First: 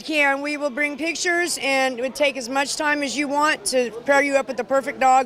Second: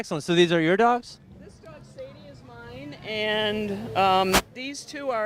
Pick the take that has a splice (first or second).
first